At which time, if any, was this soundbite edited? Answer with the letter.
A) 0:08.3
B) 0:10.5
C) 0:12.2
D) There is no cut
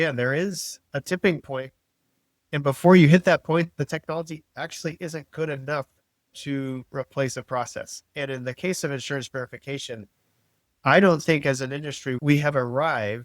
C